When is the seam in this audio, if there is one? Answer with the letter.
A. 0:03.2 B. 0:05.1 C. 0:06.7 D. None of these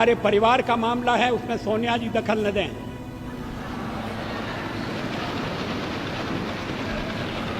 D